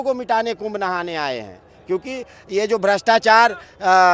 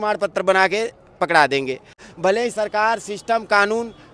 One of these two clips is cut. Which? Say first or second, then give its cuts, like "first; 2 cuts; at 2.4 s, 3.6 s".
second; 1 cut; at 2.0 s